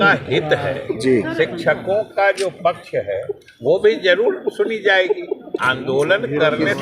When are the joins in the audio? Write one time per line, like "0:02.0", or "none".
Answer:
0:05.6

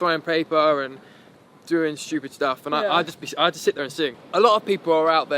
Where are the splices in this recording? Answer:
0:04.2

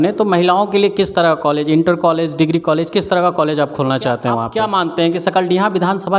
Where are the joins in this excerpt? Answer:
0:04.5

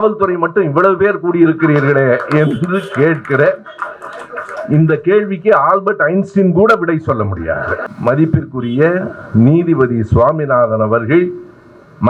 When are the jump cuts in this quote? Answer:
0:07.9

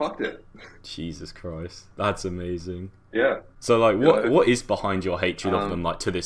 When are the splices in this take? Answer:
0:03.5

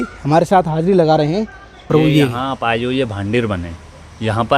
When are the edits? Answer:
0:01.9

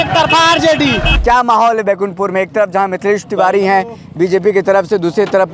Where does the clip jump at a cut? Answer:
0:01.1

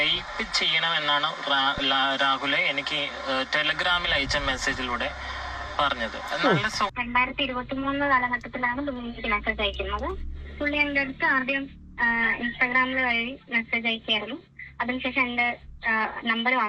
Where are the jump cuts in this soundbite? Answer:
0:06.9

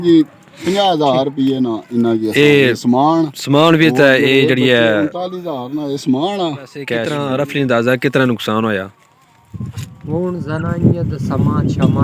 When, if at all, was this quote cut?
0:07.0

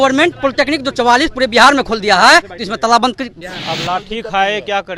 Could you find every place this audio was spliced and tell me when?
0:03.4

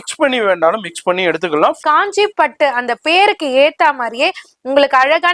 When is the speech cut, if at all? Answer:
0:01.8

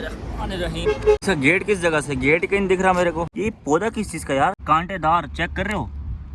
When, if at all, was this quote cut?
0:01.2
0:03.3
0:04.6

